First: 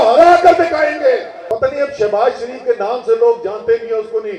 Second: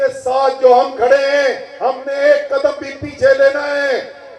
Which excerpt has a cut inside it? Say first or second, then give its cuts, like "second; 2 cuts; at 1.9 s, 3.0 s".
first; 1 cut; at 1.3 s